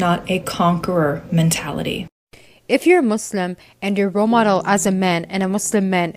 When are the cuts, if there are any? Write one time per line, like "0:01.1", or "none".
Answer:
0:02.2